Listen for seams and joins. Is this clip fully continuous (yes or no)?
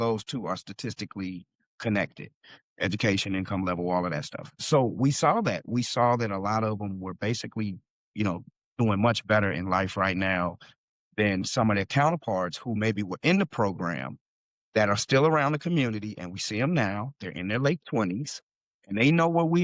no